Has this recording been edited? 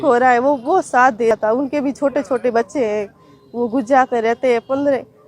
yes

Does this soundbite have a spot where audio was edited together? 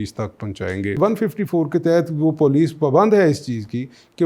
yes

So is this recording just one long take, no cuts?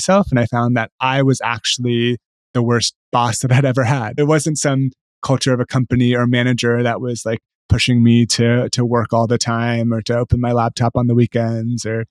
no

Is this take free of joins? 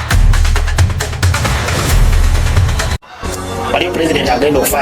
yes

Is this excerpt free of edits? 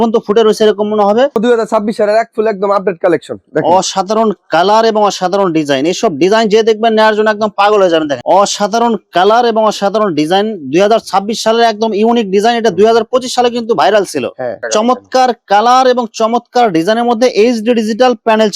no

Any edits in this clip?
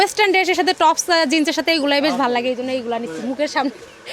no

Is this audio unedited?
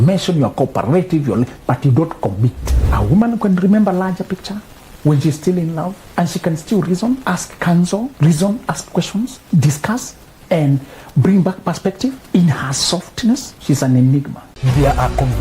no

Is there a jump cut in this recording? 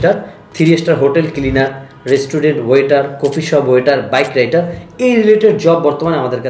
no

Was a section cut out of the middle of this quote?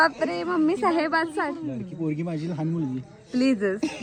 no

